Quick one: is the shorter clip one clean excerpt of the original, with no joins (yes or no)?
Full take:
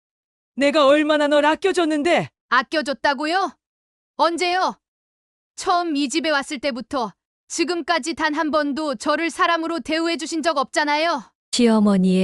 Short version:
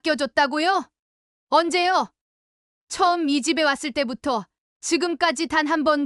yes